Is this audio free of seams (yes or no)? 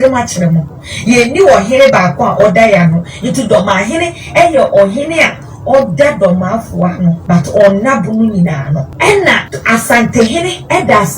no